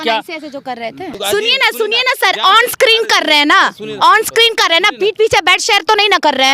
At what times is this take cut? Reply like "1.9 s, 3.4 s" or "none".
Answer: 1.2 s